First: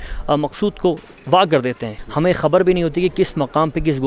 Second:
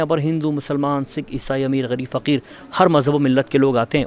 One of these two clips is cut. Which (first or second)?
first